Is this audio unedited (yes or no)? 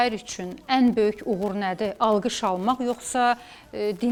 yes